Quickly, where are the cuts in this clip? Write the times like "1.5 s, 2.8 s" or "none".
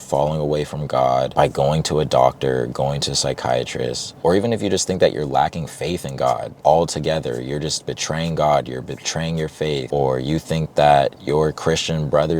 1.3 s, 6.5 s, 9.9 s